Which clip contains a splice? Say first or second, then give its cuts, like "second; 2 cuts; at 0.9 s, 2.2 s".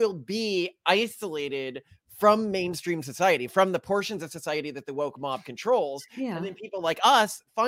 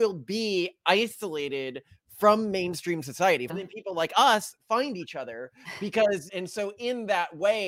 second; 2 cuts; at 3.5 s, 6.3 s